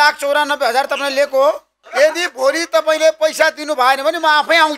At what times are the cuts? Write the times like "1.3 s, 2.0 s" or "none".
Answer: 1.9 s